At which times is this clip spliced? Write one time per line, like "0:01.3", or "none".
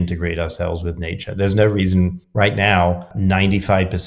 0:02.2
0:03.1